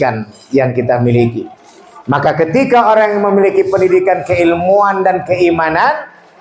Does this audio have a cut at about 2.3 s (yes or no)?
no